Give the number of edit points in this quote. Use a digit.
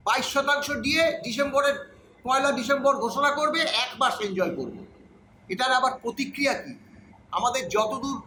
0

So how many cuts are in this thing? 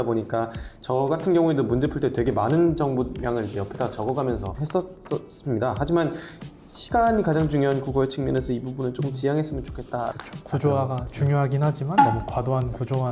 2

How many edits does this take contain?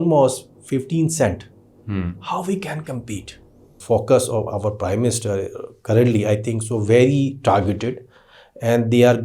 1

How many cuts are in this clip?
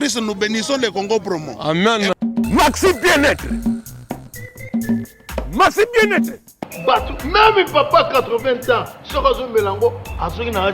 1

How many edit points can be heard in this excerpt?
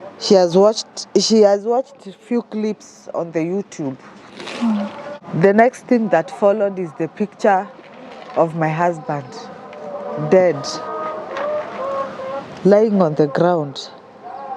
1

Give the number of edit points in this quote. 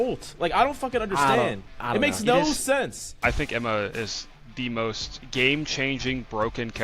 2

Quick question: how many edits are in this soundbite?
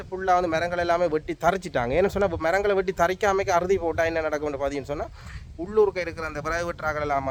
0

